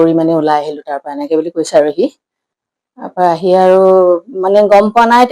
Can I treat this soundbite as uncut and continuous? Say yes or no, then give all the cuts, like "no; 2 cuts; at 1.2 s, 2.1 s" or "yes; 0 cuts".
yes; 0 cuts